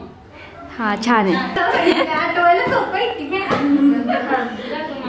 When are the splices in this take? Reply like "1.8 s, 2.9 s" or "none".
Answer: 1.6 s

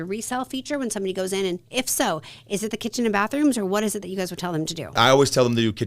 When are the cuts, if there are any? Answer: 4.9 s

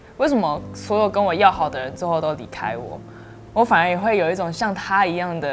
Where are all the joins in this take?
none

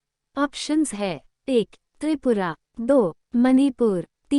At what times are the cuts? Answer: none

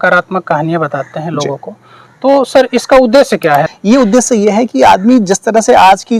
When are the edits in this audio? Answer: 3.7 s

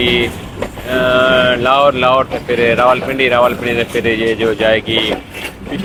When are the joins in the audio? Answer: none

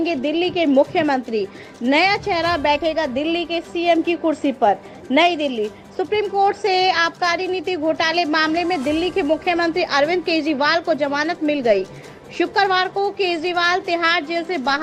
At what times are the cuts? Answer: none

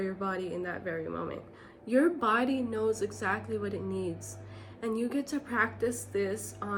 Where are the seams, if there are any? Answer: none

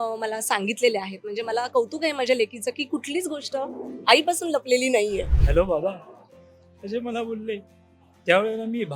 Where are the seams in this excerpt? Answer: 5.4 s

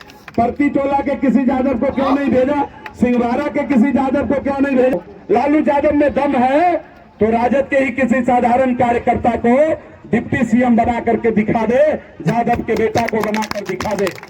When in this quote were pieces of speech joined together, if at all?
4.9 s

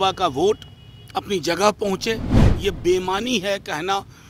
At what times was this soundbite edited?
2.5 s

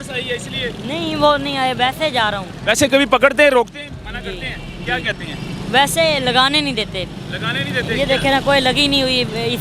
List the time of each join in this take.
none

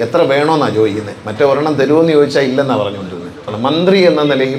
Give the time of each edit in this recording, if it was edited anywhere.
3.5 s

